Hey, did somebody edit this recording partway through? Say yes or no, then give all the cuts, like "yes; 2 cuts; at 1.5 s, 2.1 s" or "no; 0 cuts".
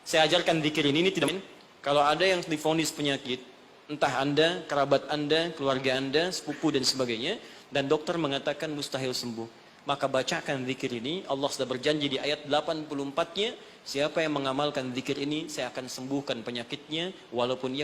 yes; 1 cut; at 1.2 s